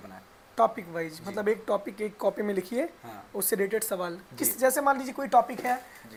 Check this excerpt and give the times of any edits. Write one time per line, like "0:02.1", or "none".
none

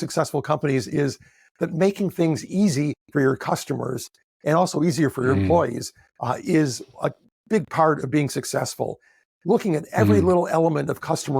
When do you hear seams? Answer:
none

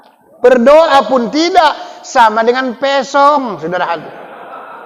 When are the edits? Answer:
none

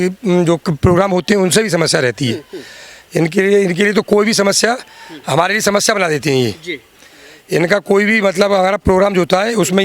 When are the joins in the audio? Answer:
none

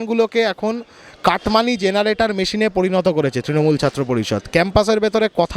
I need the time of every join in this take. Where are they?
none

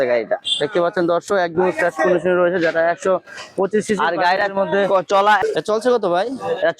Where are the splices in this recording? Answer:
0:05.4

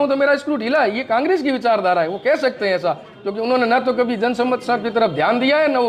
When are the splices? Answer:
none

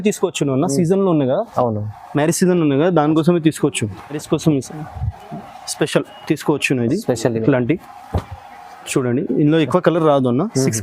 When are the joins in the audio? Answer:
0:04.2

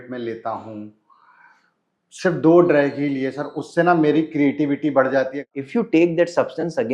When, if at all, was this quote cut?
0:05.4

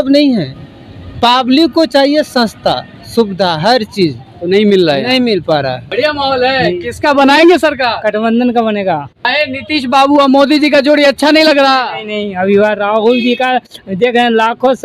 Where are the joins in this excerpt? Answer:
0:05.8
0:09.3

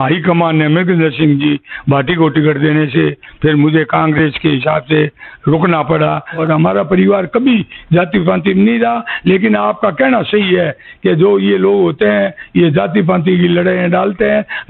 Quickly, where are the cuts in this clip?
0:06.4

